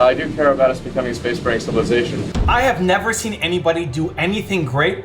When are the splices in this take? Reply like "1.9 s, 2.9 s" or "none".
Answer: 2.3 s